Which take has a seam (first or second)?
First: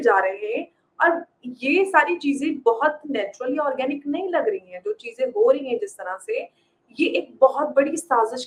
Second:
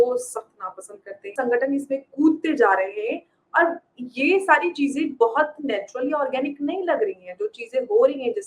second